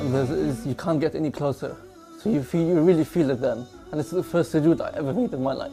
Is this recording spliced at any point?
no; 0 cuts

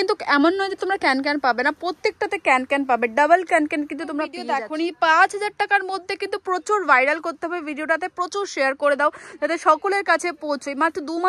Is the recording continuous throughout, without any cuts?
no; 1 cut; at 4.4 s

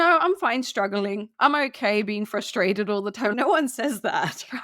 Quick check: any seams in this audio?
yes; 2 cuts; at 1.3 s, 3.3 s

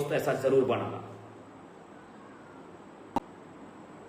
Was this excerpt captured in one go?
yes; 0 cuts

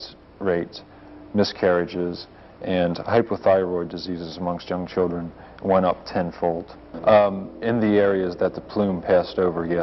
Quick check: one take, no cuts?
no; 1 cut; at 6.8 s

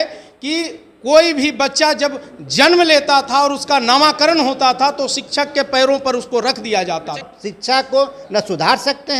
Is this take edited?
yes; 1 cut; at 7.3 s

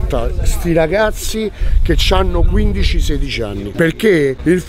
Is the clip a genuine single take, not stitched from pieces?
yes; 0 cuts

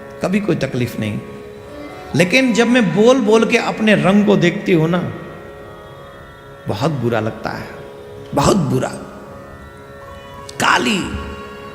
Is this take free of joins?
yes; 0 cuts

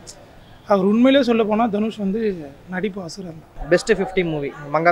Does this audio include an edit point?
yes; 1 cut; at 3.5 s

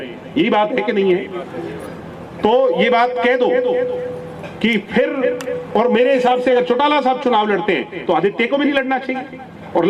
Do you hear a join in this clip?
no; 0 cuts

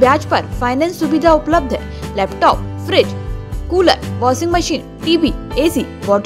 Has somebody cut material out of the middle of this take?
no; 0 cuts

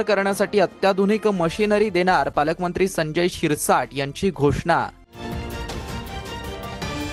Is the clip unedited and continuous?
yes; 0 cuts

